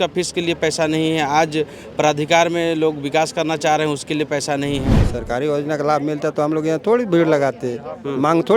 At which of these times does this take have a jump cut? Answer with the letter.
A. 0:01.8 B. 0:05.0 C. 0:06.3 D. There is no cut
B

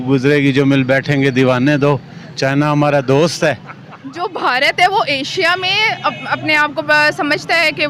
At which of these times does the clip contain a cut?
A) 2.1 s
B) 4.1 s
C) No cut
B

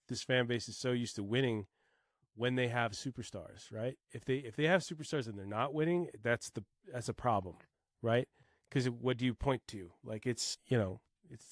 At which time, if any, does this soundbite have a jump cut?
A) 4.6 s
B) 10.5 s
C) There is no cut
B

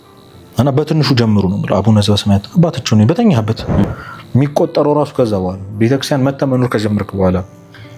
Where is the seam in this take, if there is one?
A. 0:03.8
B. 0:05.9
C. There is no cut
A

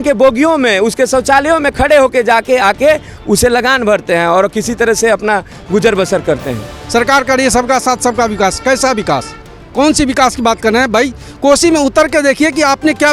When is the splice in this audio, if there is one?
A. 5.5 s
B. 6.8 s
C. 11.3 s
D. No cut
B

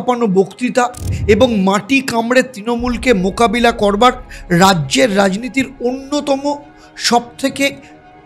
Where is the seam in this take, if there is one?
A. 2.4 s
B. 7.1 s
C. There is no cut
C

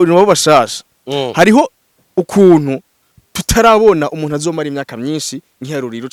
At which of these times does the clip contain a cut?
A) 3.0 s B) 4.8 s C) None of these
C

